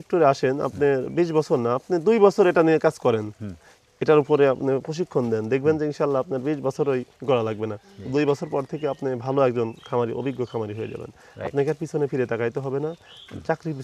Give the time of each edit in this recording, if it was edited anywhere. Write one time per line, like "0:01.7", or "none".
none